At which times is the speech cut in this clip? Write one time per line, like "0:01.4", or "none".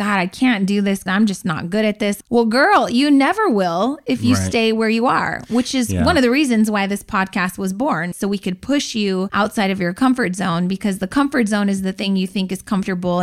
0:01.0
0:02.2
0:08.1
0:09.3